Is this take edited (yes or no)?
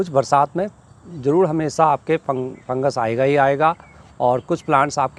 no